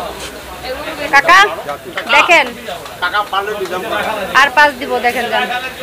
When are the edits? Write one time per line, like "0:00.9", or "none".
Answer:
0:01.0